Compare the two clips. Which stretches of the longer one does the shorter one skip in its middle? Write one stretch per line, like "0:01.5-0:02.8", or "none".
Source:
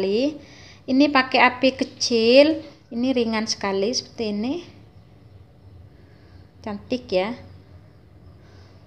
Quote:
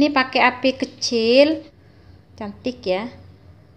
0:02.8-0:06.0